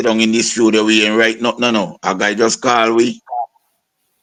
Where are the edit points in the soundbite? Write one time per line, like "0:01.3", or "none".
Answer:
none